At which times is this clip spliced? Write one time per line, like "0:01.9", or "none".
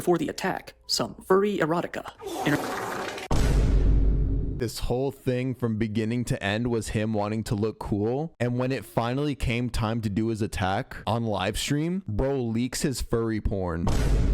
none